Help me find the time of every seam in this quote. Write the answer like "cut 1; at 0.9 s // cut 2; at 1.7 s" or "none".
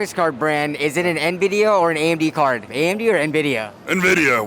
cut 1; at 2.7 s